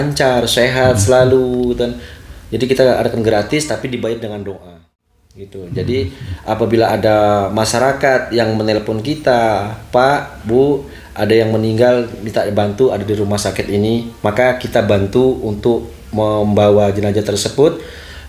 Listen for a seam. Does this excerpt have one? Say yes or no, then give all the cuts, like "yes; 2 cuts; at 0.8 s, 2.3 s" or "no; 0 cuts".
no; 0 cuts